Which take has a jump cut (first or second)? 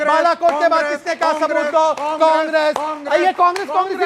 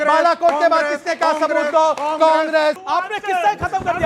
second